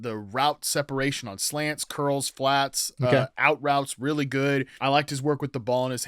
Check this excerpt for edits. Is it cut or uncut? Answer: cut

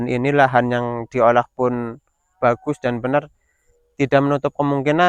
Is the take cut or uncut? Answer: uncut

